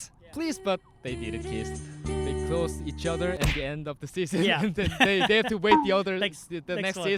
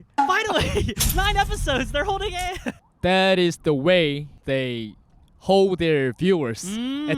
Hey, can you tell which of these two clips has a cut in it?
second; 2 cuts; at 2.8 s, 4.3 s

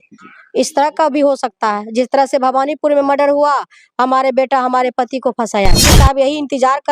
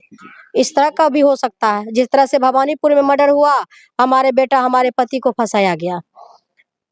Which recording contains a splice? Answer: first; 1 cut; at 5.9 s

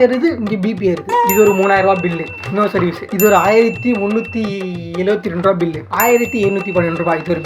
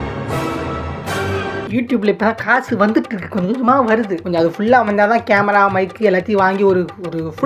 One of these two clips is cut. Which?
first; 3 cuts; at 1.3 s, 3.0 s, 5.8 s

